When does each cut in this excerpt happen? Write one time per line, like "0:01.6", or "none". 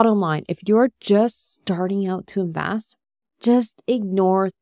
none